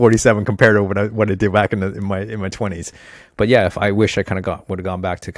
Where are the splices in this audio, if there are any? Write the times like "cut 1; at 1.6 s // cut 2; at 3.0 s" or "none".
none